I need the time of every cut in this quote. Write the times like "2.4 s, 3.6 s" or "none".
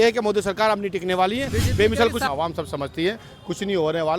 2.2 s